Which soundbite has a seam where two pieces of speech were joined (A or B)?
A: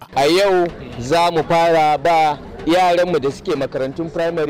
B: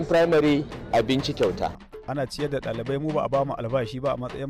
B